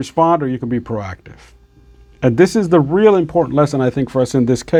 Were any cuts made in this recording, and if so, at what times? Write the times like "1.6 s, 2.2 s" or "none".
none